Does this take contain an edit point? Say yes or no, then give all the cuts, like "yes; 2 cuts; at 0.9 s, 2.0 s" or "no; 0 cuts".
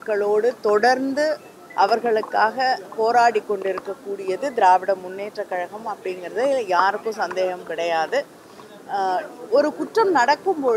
no; 0 cuts